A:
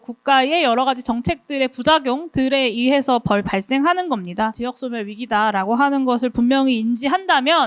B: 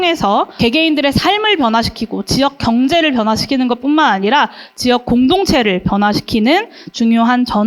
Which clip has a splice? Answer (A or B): A